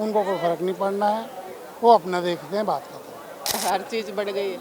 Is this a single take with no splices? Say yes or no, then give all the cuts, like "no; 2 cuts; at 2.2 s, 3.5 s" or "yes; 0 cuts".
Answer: no; 1 cut; at 3.5 s